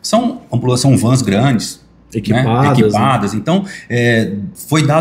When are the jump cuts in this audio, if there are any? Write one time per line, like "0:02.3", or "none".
none